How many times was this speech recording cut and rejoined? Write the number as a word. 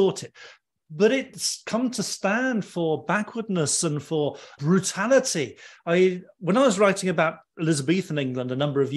one